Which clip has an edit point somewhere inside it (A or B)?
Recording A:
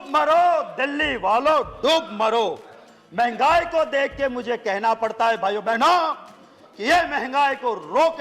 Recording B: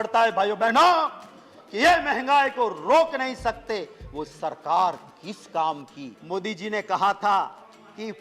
B